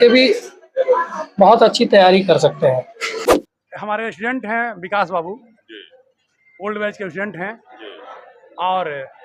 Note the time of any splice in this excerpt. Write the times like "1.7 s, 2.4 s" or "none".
3.2 s